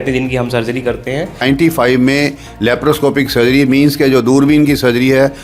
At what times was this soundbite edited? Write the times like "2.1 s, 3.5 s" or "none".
1.4 s

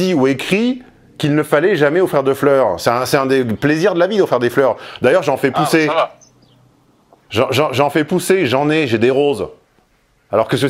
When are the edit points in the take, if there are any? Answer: none

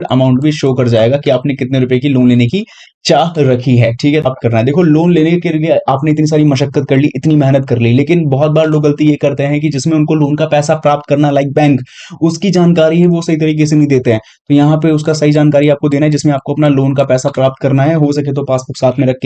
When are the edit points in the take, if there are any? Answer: 4.3 s

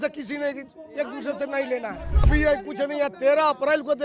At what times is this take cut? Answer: 2.3 s

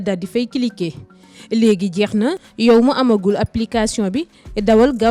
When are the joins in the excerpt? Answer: 2.5 s

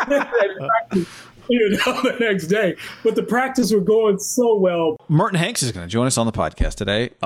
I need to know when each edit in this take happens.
5.0 s

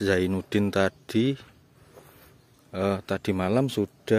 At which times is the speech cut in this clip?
none

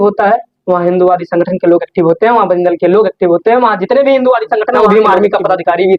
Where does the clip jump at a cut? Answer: 4.8 s

